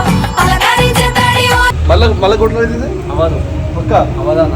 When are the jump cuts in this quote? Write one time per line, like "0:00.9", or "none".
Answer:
0:01.8